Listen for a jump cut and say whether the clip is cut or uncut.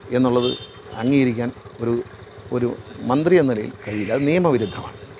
uncut